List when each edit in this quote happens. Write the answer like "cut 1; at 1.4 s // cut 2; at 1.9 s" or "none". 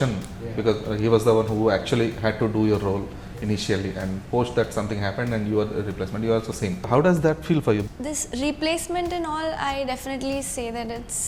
cut 1; at 6.8 s // cut 2; at 7.9 s